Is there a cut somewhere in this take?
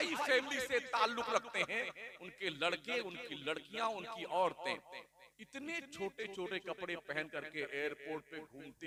no; 0 cuts

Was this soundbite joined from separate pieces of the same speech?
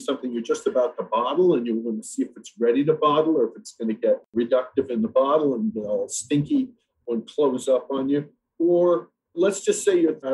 yes; 2 cuts; at 4.3 s, 7.0 s

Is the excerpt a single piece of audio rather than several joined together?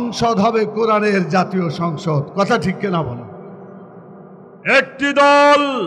no; 1 cut; at 4.1 s

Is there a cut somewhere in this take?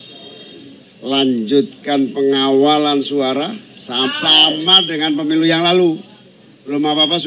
yes; 1 cut; at 4.1 s

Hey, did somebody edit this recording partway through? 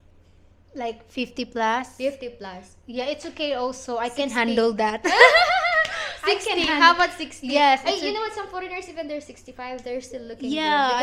no; 0 cuts

